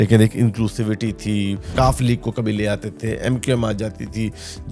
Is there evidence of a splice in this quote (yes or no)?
yes